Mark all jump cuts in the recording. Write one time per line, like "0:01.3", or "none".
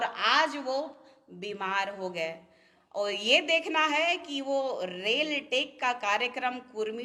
none